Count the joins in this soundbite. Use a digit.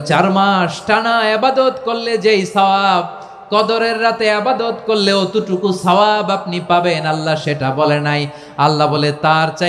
0